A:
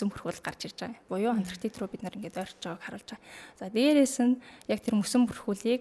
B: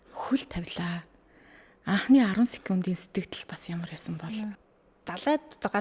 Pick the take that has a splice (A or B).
B